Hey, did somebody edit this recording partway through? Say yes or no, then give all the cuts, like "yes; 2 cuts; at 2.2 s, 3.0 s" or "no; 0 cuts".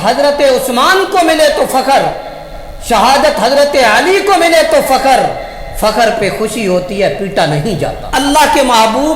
yes; 1 cut; at 8.0 s